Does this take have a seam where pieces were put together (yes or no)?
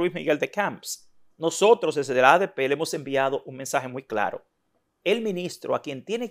no